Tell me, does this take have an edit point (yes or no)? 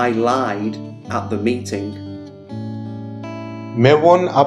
no